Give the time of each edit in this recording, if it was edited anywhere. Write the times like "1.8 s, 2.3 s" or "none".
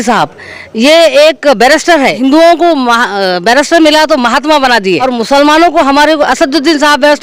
2.2 s, 5.0 s